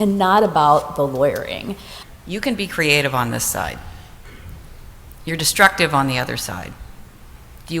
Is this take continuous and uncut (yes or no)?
no